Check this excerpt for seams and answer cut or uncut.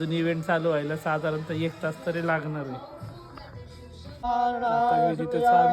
cut